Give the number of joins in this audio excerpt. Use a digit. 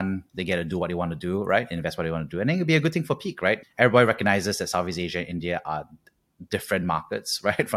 1